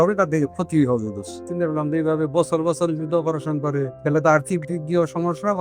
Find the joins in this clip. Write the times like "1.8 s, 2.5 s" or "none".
1.4 s, 3.9 s

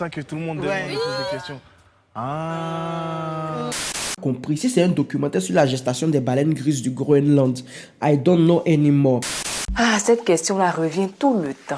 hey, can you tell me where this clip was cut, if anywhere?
4.1 s, 9.4 s

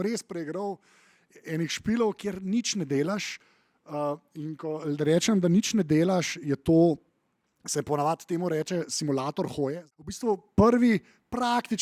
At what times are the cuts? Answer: 9.8 s

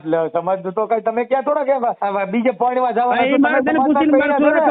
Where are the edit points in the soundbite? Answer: 2.0 s

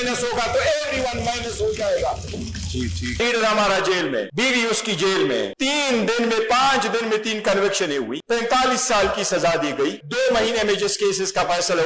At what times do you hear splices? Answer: 3.2 s, 4.3 s, 5.5 s, 8.2 s, 10.0 s

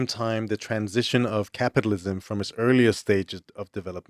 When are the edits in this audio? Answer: none

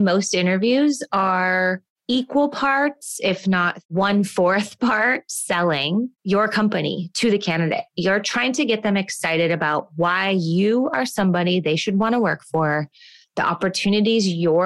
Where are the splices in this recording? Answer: 6.2 s

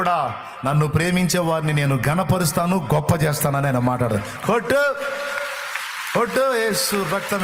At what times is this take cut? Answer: none

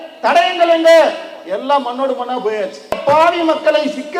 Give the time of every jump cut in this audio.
3.0 s

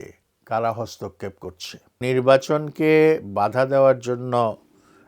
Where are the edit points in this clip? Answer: 2.0 s

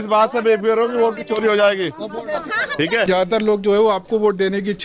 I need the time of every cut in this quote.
3.1 s

